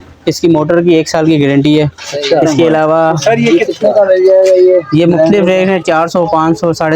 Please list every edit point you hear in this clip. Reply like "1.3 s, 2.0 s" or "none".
3.5 s